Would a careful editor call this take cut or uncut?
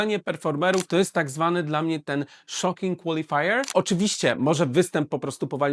cut